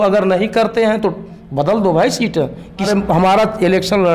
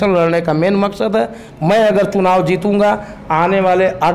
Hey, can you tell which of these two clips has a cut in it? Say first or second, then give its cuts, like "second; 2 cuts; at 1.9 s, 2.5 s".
first; 1 cut; at 2.9 s